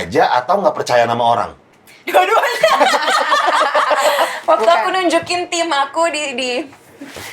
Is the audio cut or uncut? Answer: cut